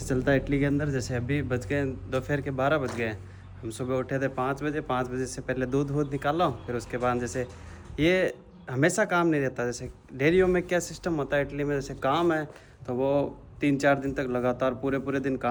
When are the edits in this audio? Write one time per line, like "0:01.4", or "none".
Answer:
none